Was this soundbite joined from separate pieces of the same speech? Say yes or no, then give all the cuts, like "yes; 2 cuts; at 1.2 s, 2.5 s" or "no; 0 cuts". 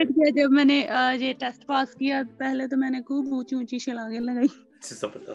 no; 0 cuts